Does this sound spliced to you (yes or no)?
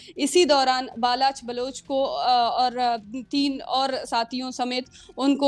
no